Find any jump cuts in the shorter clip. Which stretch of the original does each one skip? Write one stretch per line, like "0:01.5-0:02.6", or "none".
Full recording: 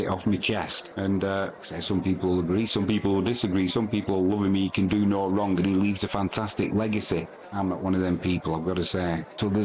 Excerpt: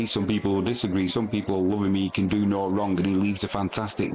none